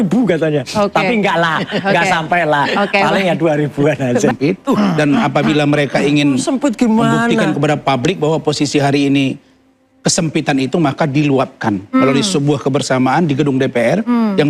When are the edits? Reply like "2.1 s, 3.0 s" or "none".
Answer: 4.3 s